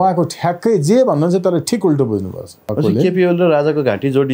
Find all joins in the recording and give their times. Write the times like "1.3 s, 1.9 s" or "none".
2.7 s